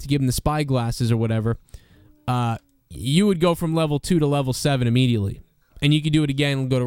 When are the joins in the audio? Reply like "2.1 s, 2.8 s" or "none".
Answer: none